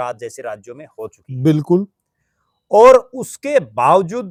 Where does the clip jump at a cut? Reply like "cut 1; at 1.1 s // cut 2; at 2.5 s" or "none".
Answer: none